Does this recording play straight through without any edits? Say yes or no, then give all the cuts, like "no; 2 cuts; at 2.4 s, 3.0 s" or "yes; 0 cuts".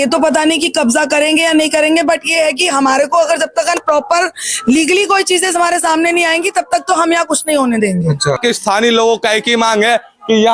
no; 1 cut; at 8.4 s